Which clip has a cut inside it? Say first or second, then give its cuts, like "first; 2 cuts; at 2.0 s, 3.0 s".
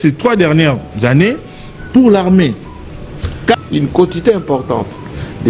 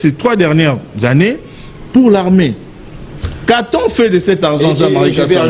first; 1 cut; at 3.6 s